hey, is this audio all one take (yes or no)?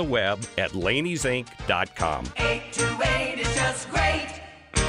no